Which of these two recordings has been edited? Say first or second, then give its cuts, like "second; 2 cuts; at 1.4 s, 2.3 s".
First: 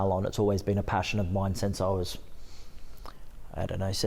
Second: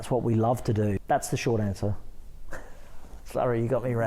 second; 1 cut; at 1.0 s